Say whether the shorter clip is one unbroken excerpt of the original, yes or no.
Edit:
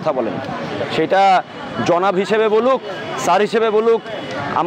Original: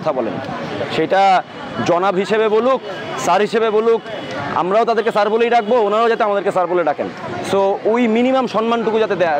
yes